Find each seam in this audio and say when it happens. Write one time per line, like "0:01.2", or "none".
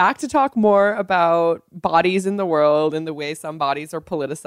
none